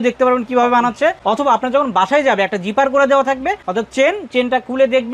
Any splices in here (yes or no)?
yes